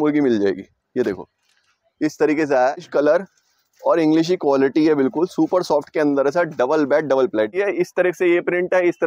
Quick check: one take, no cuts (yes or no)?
no